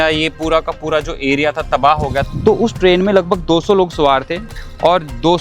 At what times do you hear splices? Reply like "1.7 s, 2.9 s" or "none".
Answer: 2.3 s, 4.5 s